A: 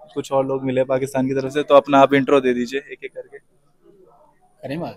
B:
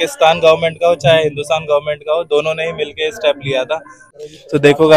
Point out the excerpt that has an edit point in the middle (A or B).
B